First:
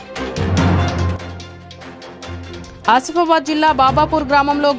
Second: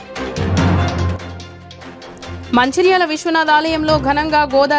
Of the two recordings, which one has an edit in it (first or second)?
second